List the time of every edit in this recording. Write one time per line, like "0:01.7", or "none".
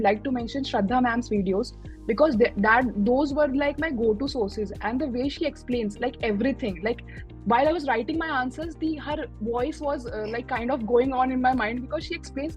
none